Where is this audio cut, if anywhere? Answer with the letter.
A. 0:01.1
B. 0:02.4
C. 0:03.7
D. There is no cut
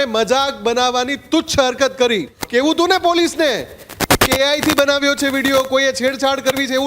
B